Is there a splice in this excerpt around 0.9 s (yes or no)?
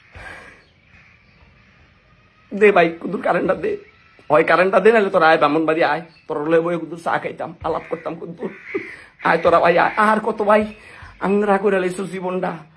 yes